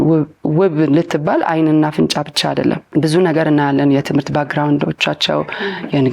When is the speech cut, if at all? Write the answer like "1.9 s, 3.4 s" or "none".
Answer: 2.8 s

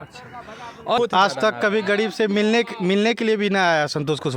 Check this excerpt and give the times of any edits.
1.0 s

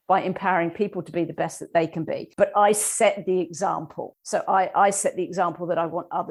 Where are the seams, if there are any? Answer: none

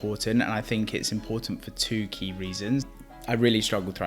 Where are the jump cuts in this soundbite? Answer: 2.8 s

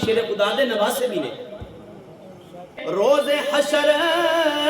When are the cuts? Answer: 2.8 s

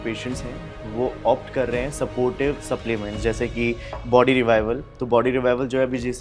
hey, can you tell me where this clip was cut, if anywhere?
none

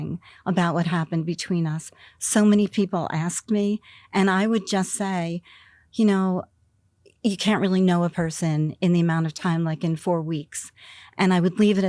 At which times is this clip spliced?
none

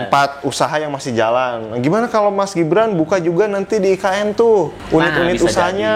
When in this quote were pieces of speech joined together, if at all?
4.8 s

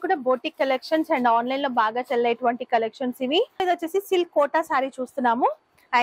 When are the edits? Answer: 3.6 s

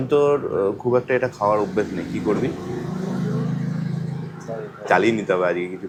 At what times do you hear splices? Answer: none

